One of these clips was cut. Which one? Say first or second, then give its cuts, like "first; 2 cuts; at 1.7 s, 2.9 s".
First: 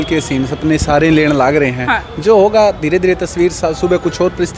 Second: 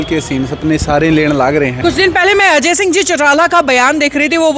second; 1 cut; at 1.7 s